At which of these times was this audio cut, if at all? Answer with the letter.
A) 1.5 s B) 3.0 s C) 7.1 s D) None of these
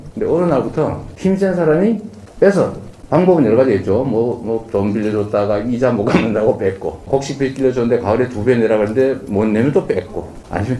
C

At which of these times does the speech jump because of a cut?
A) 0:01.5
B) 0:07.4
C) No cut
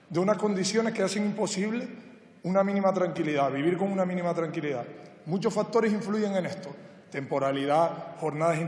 B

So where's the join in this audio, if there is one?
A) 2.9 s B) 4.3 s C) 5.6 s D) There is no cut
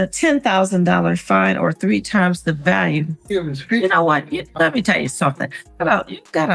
D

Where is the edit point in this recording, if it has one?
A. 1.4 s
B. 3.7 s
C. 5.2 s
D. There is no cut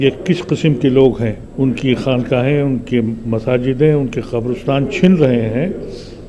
A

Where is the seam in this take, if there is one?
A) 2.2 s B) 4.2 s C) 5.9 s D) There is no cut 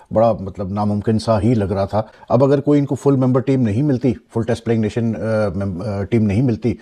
D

